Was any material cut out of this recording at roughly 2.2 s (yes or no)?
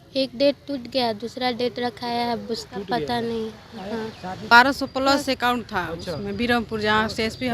no